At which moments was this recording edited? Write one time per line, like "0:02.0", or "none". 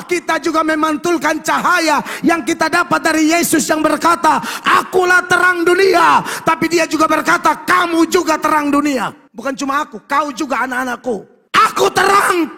0:09.3
0:11.4